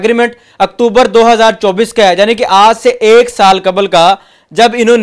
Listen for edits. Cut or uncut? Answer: uncut